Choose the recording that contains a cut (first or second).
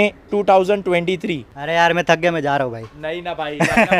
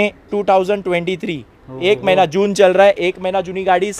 first